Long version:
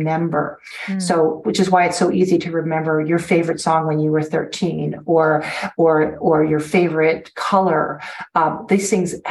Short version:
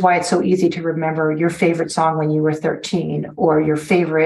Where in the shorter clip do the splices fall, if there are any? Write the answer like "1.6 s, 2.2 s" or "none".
3.3 s